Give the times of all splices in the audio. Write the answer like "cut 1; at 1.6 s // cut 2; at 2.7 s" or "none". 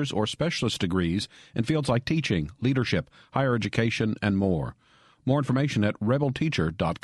none